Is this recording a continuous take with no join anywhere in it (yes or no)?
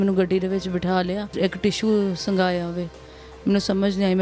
no